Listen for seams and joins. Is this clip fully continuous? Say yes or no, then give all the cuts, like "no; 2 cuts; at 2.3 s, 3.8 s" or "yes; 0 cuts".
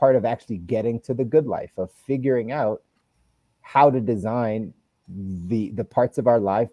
yes; 0 cuts